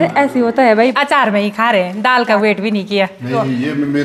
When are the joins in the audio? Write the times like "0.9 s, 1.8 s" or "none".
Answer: 0.9 s